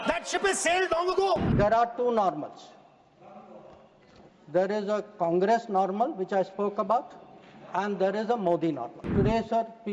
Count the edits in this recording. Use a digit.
2